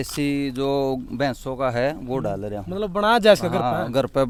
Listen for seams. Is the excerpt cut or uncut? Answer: uncut